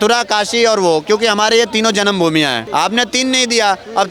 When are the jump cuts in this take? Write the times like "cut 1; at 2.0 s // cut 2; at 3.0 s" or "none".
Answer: cut 1; at 2.6 s